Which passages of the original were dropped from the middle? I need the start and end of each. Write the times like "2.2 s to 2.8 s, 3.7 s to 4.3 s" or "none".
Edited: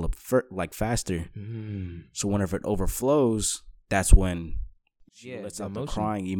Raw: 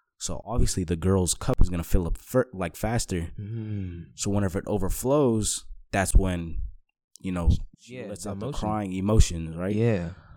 7.1 s to 7.7 s

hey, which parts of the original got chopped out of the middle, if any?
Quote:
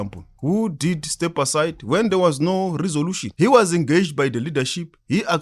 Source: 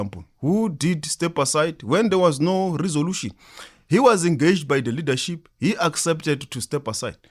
3.2 s to 3.7 s

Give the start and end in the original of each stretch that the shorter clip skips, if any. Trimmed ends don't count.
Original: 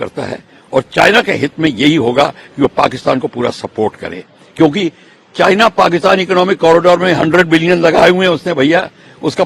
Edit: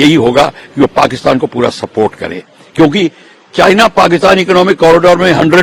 none

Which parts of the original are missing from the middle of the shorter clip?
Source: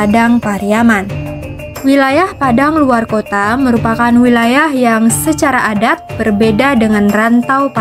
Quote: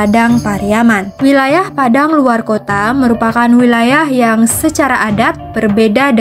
1.1 s to 1.7 s

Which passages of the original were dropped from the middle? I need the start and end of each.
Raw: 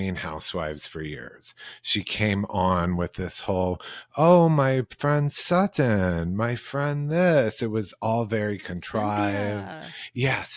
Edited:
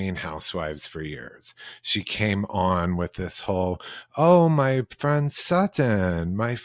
none

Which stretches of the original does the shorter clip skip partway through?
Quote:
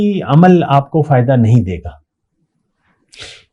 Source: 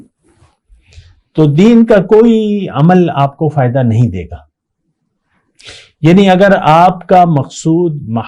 none

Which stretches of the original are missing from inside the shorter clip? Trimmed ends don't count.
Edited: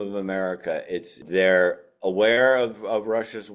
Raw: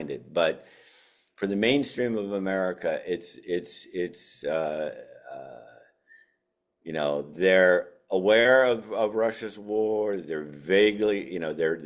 3.4 s to 7.3 s

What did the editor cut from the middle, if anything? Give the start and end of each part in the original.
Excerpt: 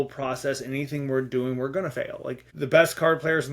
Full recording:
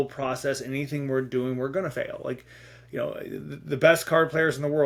2.5 s to 3.6 s

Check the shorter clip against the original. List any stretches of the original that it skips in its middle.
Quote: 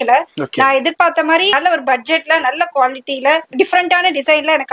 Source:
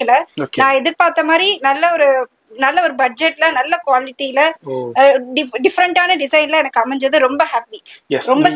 1.6 s to 2.7 s, 4.6 s to 5.5 s

